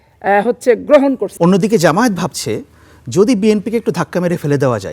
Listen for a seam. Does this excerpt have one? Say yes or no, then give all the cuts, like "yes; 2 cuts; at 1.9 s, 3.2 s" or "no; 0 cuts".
yes; 1 cut; at 1.3 s